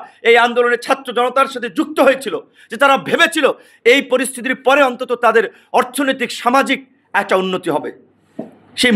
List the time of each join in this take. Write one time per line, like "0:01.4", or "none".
none